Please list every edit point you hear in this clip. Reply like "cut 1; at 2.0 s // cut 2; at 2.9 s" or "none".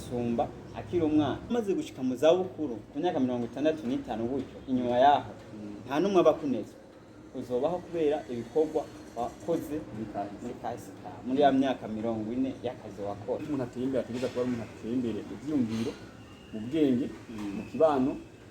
cut 1; at 1.5 s // cut 2; at 13.4 s